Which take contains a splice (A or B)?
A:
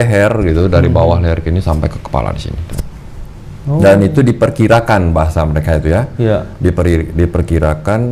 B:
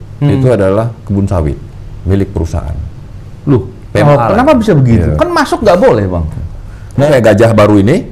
B